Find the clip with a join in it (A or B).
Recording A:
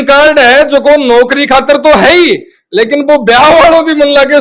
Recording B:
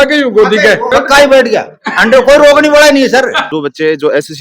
B